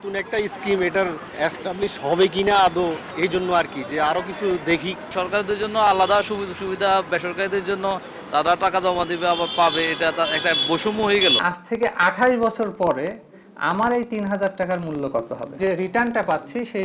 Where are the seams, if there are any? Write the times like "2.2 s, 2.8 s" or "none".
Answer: 1.2 s, 3.1 s, 5.0 s, 11.4 s, 15.5 s